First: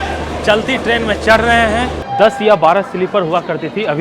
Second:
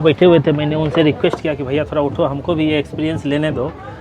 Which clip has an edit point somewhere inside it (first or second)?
first